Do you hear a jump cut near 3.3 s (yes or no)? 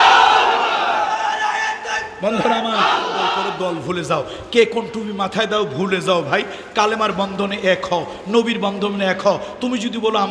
yes